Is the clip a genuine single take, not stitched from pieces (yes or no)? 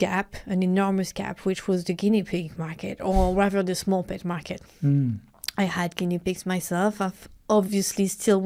yes